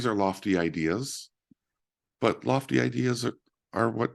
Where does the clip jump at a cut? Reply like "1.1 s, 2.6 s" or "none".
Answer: none